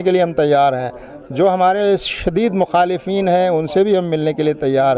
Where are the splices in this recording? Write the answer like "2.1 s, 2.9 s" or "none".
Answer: none